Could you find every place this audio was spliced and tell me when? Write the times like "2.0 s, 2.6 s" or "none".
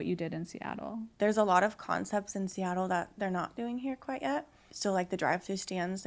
1.1 s, 4.7 s